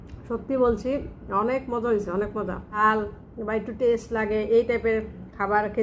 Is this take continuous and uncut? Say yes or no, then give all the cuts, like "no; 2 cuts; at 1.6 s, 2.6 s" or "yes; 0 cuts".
no; 1 cut; at 2.6 s